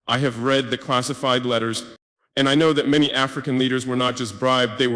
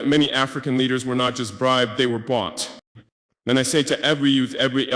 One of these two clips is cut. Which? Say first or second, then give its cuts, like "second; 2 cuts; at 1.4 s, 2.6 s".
second; 1 cut; at 3.1 s